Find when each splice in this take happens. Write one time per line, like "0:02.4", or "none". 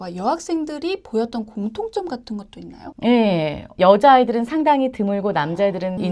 0:03.7